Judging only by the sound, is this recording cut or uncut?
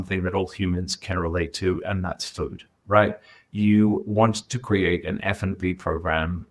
uncut